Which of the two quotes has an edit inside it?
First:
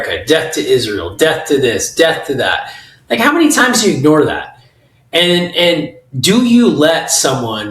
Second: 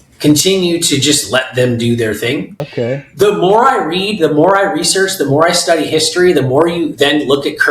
second; 1 cut; at 2.6 s

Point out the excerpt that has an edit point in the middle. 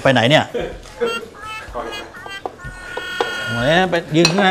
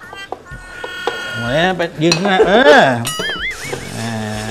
second; 1 cut; at 3.5 s

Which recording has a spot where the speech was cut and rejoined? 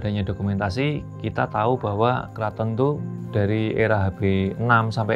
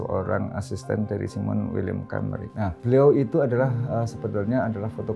first; 2 cuts; at 2.3 s, 3.1 s

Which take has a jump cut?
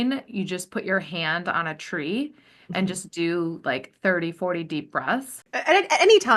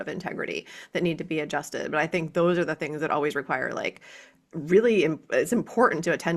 first; 1 cut; at 5.4 s

